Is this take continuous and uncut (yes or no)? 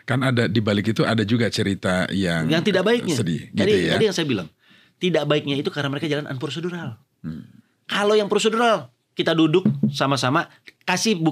yes